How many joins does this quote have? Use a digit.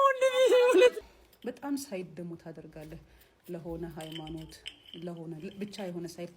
1